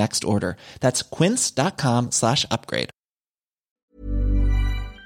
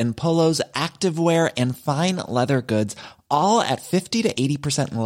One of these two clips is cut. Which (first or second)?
first